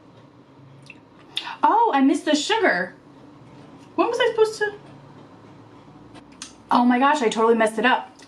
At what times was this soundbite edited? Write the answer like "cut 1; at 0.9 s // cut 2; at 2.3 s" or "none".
cut 1; at 6.2 s